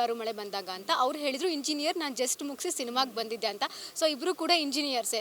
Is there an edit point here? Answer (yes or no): no